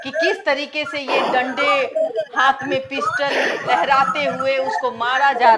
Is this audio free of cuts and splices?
yes; 0 cuts

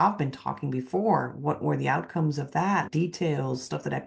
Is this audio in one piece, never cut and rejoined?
no; 1 cut; at 2.9 s

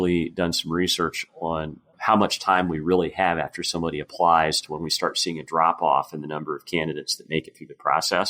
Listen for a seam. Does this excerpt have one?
no; 0 cuts

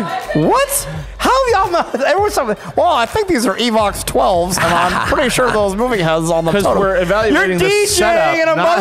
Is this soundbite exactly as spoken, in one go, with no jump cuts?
yes; 0 cuts

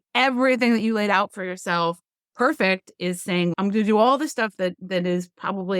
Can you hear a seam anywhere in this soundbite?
yes; 1 cut; at 3.5 s

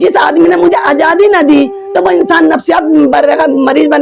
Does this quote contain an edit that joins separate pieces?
no; 0 cuts

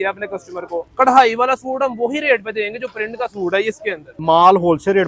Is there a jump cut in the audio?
yes; 1 cut; at 4.1 s

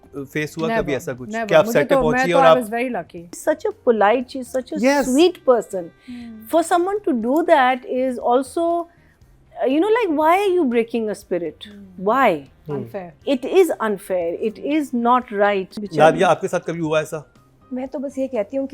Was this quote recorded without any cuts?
no; 2 cuts; at 3.4 s, 15.8 s

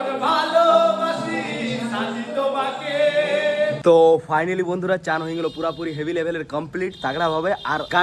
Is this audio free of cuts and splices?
yes; 0 cuts

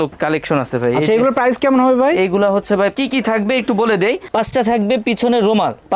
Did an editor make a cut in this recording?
yes; 1 cut; at 2.9 s

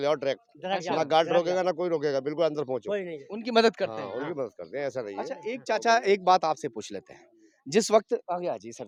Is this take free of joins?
yes; 0 cuts

